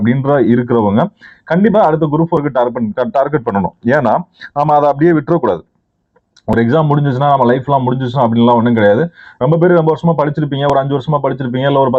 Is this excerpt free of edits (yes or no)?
yes